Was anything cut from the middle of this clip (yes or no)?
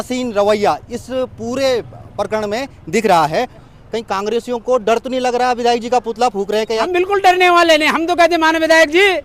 yes